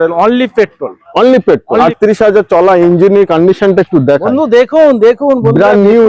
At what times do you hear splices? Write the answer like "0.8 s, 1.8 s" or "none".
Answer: 1.8 s